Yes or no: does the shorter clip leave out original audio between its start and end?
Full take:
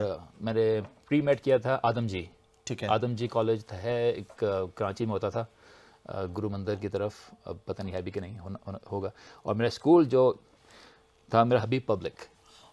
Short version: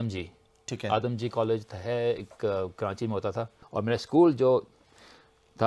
yes